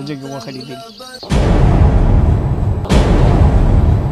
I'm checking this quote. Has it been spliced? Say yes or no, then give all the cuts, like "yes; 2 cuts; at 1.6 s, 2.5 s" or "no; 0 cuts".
no; 0 cuts